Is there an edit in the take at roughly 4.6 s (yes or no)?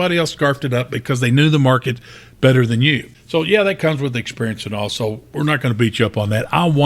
no